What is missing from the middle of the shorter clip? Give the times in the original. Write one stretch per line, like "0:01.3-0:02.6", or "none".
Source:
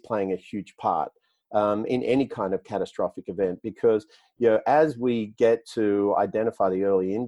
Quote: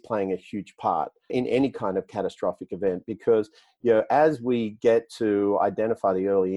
0:01.3-0:01.8